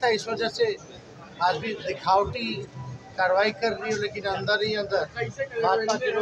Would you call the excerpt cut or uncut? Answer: uncut